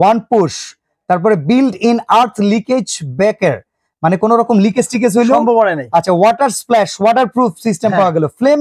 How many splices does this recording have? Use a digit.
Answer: 0